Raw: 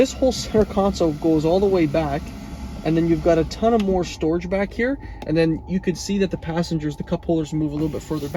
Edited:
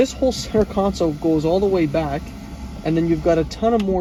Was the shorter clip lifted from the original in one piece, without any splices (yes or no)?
yes